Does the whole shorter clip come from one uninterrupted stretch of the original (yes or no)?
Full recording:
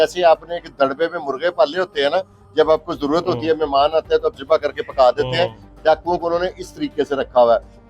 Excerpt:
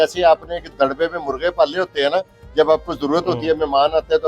yes